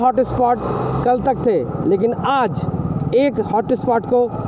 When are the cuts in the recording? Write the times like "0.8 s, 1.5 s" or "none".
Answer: none

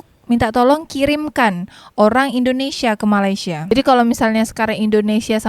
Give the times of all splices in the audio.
3.6 s

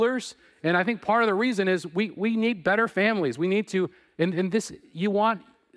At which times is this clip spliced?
none

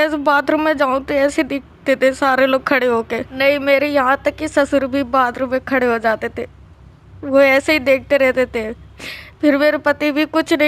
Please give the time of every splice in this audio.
3.3 s

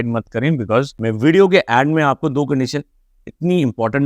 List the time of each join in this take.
0.9 s

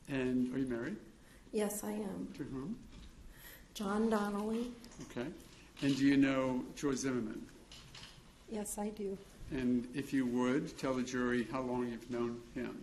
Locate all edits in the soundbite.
none

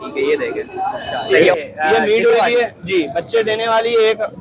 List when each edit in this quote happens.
1.5 s

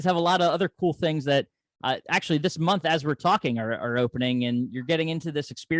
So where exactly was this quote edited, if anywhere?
none

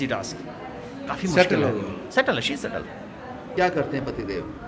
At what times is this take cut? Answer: 3.5 s

